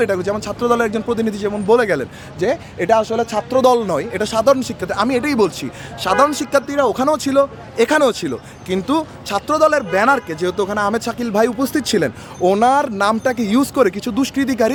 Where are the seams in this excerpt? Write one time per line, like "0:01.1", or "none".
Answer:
none